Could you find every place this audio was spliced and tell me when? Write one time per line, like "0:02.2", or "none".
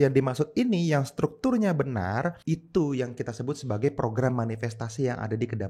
0:02.4